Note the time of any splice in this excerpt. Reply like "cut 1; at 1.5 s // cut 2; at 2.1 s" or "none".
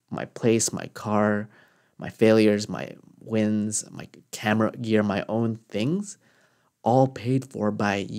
none